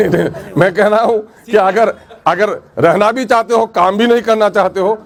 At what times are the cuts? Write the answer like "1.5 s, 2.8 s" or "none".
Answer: none